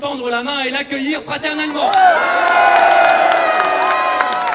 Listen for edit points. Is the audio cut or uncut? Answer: uncut